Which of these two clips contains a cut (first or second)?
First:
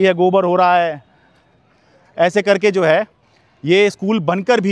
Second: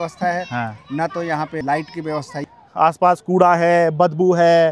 second